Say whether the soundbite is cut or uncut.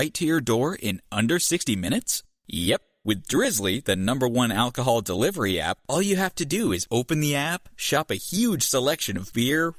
uncut